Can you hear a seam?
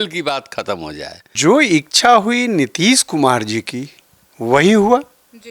yes; 1 cut; at 1.2 s

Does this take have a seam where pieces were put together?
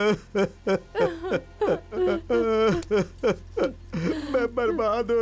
yes; 1 cut; at 2.0 s

